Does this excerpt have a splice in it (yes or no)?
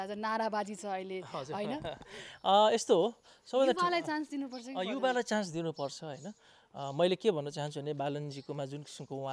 no